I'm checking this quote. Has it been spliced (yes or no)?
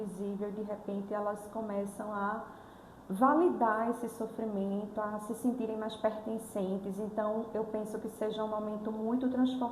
no